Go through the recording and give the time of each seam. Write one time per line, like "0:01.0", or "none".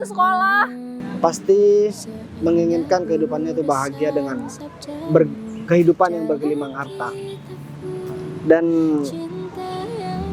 0:01.0